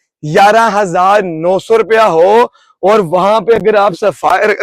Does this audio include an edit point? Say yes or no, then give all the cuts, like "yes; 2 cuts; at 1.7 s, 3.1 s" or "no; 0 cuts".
no; 0 cuts